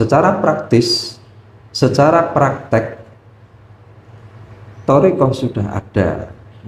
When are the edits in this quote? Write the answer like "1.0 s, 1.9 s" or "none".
none